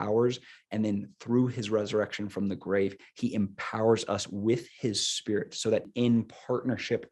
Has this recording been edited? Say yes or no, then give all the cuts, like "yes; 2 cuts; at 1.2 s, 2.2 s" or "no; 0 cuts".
yes; 1 cut; at 5.9 s